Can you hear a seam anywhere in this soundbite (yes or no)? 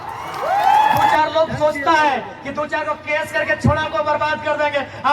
yes